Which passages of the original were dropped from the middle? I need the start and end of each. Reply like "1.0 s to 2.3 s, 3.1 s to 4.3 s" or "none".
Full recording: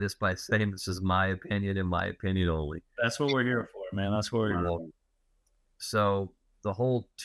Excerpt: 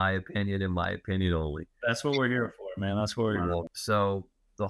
4.9 s to 5.8 s